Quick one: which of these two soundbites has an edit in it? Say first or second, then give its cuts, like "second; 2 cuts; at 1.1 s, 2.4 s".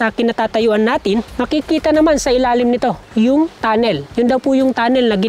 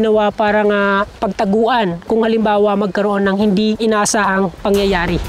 first; 2 cuts; at 1.3 s, 3.9 s